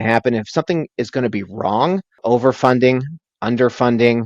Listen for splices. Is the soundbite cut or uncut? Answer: cut